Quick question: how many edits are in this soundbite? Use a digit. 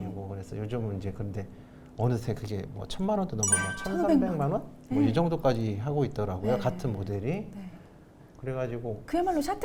0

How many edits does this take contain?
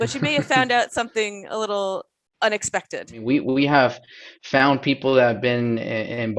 2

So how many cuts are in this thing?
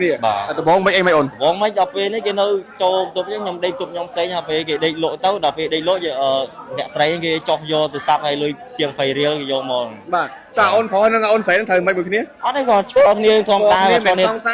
0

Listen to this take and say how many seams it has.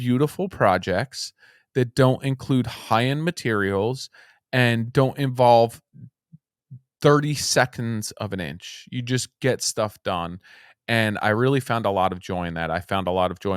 1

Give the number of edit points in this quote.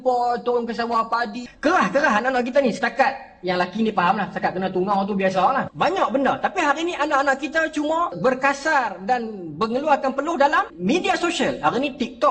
4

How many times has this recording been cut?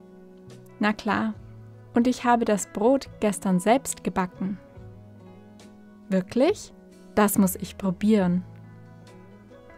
4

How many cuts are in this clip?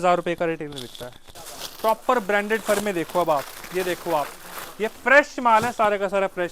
1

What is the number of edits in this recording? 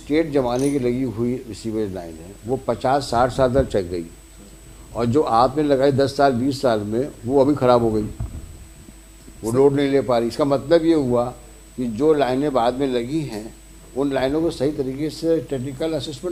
0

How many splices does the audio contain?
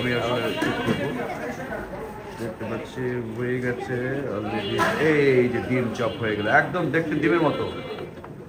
0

